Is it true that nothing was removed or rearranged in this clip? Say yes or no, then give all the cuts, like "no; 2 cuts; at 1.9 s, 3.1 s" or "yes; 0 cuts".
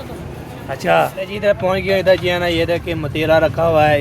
no; 1 cut; at 1.2 s